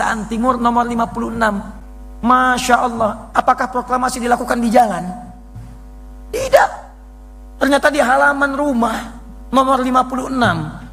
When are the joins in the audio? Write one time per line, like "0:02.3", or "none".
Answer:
none